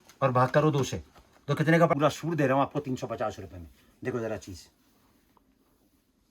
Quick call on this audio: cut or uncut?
cut